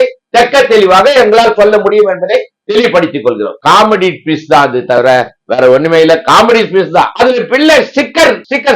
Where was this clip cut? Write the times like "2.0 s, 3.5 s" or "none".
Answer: 3.6 s, 7.1 s